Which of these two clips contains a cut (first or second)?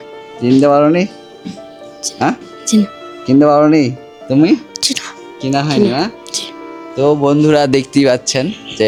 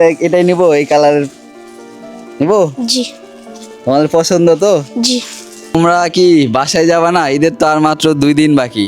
second